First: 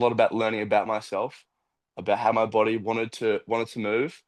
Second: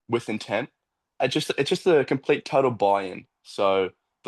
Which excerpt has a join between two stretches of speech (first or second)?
second